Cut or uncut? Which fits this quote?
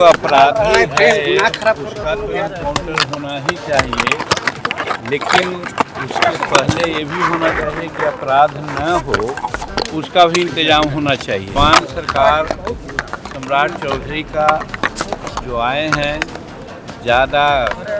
cut